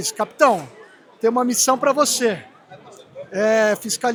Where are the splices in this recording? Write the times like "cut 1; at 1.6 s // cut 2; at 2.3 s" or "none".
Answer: none